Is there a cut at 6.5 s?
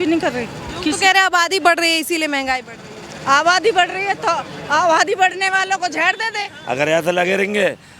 yes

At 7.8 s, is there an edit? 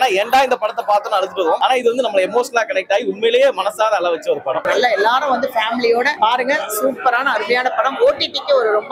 no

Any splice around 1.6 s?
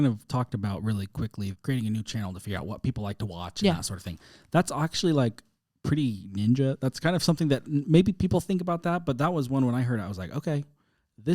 yes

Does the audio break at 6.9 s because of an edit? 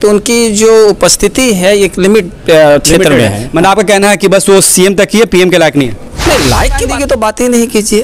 yes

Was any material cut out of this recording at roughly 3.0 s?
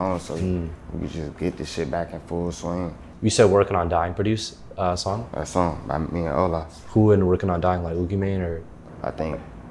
yes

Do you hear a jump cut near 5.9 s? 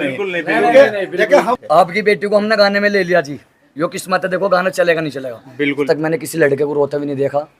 yes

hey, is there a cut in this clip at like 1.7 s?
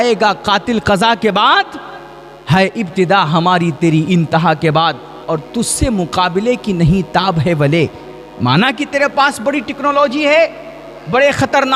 no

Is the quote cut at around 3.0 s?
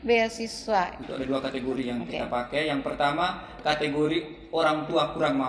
no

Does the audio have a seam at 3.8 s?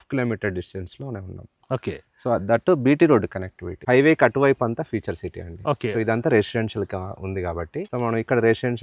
yes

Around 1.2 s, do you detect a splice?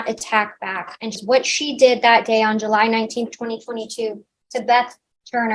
yes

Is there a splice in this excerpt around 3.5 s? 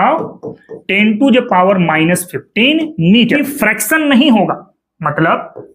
yes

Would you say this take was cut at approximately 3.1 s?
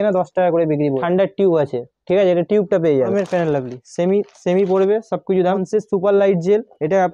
yes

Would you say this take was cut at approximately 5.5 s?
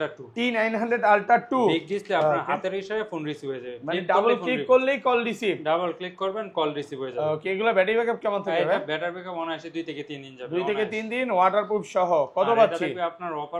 no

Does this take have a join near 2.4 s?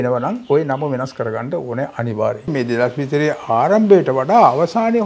yes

